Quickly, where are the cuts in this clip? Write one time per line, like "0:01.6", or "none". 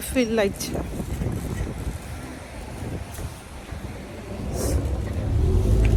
none